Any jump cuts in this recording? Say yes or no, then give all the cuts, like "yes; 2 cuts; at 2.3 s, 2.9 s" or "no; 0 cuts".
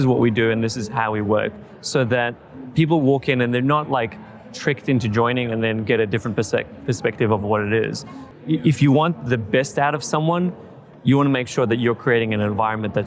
yes; 1 cut; at 8.2 s